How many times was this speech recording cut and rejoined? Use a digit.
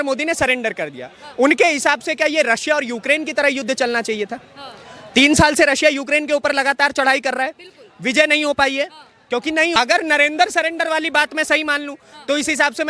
1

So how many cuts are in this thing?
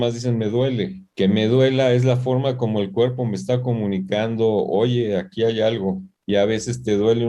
2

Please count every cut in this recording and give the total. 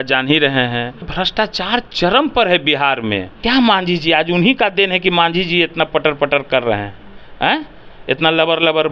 2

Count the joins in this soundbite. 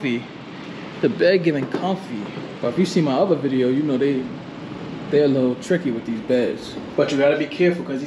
1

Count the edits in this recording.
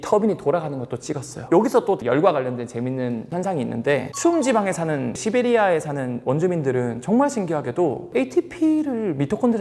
0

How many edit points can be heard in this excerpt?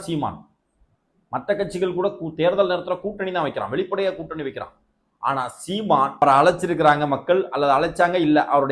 1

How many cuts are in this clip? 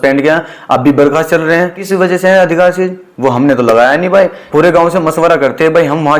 2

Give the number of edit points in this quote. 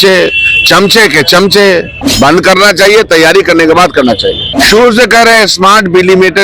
2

